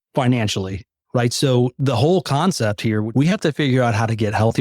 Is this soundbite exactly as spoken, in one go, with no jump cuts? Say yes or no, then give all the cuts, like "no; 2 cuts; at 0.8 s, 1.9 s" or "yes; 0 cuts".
no; 1 cut; at 3.1 s